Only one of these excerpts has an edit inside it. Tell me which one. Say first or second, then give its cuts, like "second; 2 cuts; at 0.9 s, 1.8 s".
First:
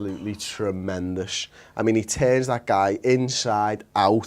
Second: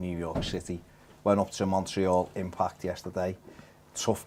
first; 1 cut; at 2.8 s